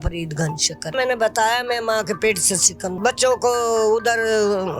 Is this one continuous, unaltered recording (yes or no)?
no